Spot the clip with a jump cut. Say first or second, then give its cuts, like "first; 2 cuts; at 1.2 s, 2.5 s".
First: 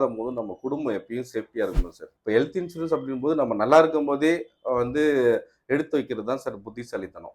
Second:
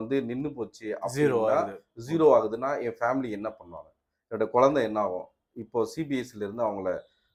first; 1 cut; at 2.1 s